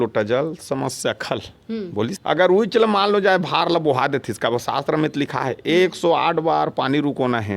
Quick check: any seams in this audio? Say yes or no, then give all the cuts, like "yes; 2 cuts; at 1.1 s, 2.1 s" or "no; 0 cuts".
yes; 1 cut; at 2.2 s